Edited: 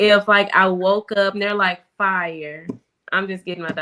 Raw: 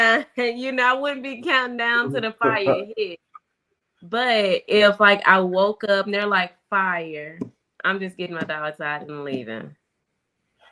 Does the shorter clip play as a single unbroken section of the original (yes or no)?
yes